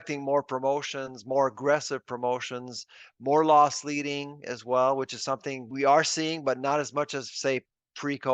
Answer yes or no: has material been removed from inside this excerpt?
yes